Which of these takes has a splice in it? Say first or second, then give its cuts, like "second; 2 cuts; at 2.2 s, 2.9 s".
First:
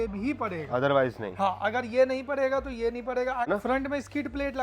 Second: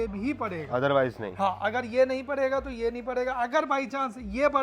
first; 1 cut; at 3.5 s